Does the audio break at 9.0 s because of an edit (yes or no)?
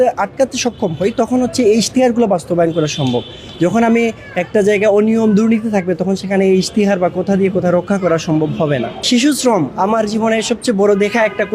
yes